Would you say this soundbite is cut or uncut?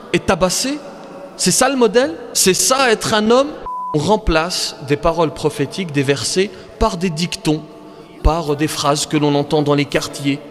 cut